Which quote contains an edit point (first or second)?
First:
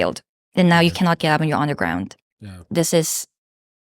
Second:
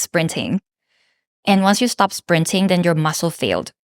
first